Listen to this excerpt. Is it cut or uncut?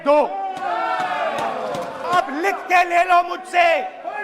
cut